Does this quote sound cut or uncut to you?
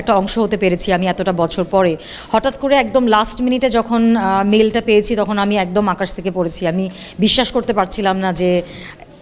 uncut